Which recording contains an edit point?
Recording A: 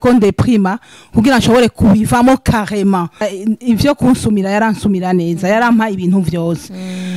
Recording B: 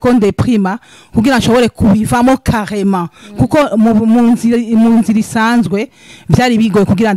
A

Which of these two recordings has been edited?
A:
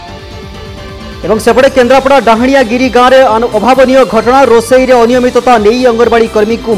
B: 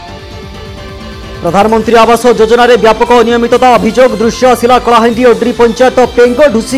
A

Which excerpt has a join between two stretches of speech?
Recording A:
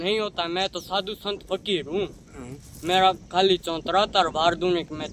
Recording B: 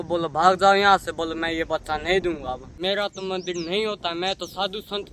B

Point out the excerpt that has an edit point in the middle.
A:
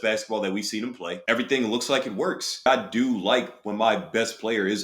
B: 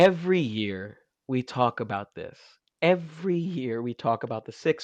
A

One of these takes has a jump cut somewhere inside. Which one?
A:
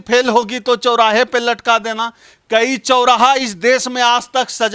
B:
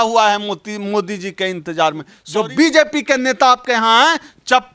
B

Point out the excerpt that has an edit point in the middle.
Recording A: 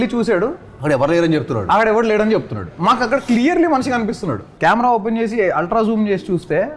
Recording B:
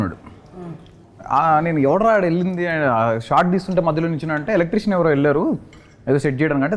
A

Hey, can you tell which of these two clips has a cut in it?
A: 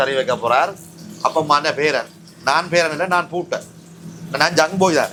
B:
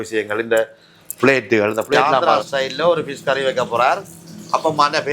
B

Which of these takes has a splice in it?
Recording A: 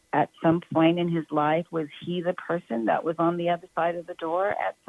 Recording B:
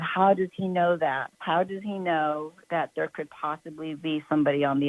B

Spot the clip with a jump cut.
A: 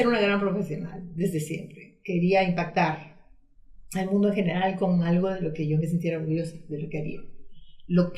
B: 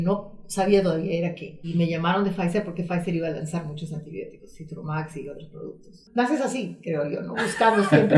B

